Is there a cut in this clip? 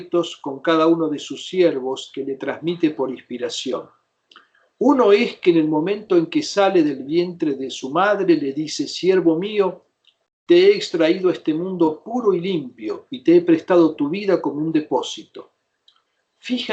no; 0 cuts

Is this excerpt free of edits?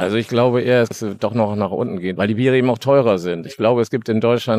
no; 2 cuts; at 0.9 s, 2.1 s

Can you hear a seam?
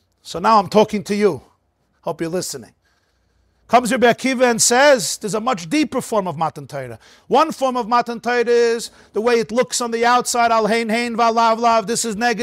no; 0 cuts

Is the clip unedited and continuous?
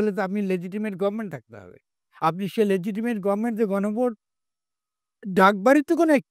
yes; 0 cuts

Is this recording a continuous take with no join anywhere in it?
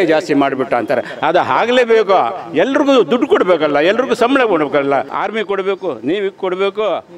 no; 1 cut; at 5.1 s

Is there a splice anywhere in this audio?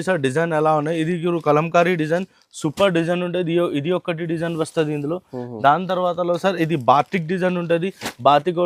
no; 0 cuts

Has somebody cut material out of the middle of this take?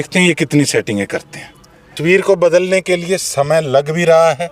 yes; 1 cut; at 2.0 s

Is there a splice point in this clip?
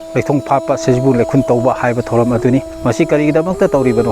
yes; 1 cut; at 2.7 s

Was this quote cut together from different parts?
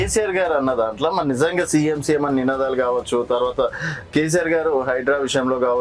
no; 0 cuts

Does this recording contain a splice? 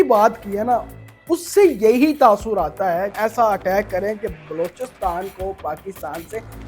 yes; 1 cut; at 3.1 s

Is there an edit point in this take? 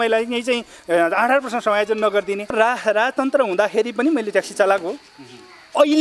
yes; 1 cut; at 2.5 s

